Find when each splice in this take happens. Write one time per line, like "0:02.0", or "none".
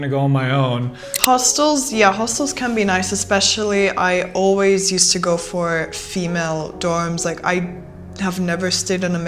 0:01.1